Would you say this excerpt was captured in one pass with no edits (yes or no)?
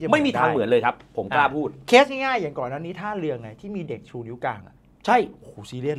yes